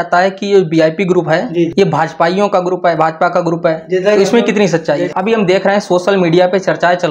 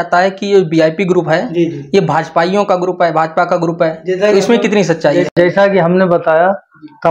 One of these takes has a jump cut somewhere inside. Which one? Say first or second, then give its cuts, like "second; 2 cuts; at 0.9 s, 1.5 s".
first; 2 cuts; at 1.7 s, 5.1 s